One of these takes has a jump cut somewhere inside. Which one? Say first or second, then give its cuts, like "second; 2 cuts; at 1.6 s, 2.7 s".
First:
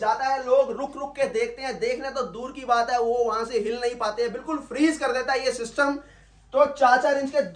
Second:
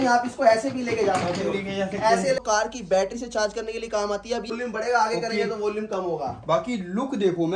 second; 2 cuts; at 2.4 s, 4.5 s